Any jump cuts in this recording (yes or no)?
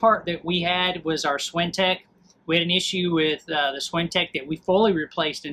no